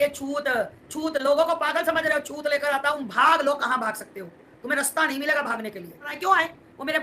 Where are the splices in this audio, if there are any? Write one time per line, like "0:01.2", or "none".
0:03.0
0:06.1